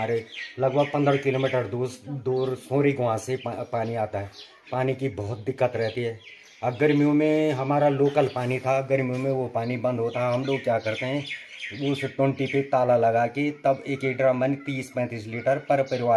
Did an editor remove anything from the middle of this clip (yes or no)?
no